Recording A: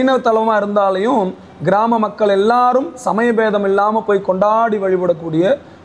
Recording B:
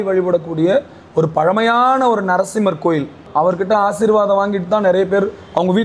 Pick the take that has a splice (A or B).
B